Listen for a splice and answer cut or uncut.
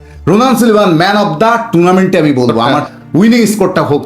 cut